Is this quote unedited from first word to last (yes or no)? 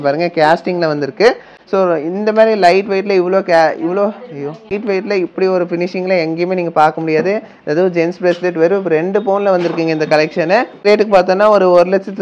yes